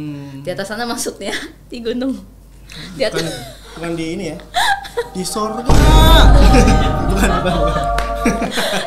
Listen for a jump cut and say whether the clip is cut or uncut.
uncut